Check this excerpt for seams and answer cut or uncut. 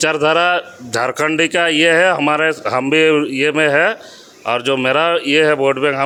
uncut